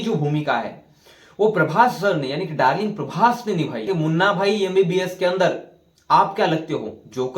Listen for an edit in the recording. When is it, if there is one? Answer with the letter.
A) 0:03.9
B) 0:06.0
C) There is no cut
A